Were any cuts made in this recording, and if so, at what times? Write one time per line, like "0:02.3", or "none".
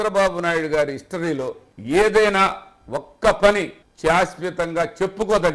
0:01.7
0:03.8